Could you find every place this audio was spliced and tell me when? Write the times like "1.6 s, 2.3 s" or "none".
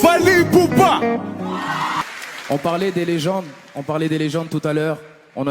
2.2 s